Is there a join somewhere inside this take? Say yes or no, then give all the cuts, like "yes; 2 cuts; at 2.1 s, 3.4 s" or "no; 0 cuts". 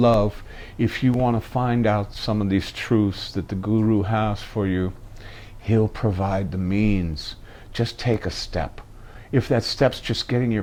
no; 0 cuts